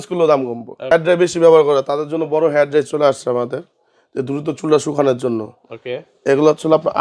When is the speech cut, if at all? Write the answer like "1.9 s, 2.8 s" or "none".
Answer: 0.9 s